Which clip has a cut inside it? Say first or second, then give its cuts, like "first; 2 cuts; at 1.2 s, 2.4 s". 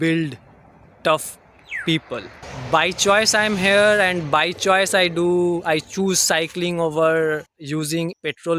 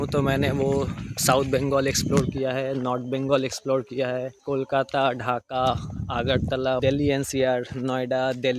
second; 2 cuts; at 4.3 s, 6.8 s